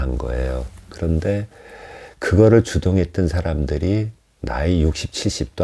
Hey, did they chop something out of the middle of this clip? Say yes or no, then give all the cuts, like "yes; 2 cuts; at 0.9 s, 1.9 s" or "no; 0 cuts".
no; 0 cuts